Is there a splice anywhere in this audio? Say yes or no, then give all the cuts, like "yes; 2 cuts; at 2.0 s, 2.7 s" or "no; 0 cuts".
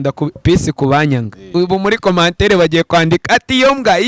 no; 0 cuts